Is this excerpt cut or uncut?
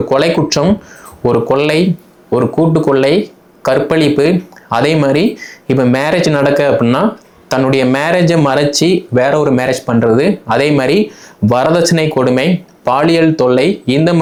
uncut